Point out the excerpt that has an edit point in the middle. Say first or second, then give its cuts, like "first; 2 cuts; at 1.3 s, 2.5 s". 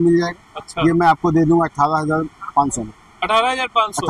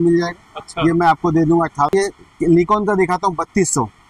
second; 1 cut; at 1.9 s